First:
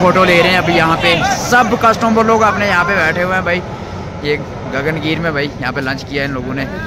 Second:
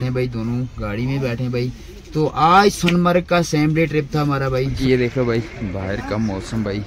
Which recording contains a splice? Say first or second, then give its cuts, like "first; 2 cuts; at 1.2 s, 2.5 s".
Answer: second; 1 cut; at 4.7 s